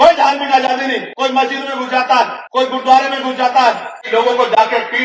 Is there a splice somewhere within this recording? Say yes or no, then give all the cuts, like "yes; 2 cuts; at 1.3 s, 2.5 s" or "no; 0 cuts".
yes; 3 cuts; at 1.1 s, 2.4 s, 3.9 s